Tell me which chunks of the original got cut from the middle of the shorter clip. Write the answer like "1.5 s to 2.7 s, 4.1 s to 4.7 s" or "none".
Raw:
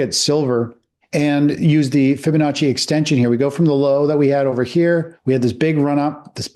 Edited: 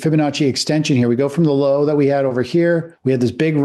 none

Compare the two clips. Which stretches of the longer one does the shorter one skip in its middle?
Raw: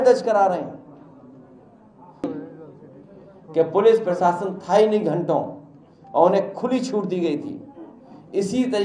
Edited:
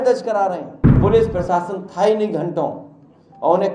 1.0 s to 3.7 s

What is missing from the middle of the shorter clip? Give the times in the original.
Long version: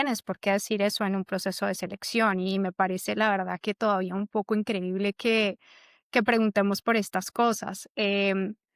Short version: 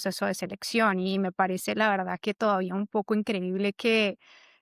none

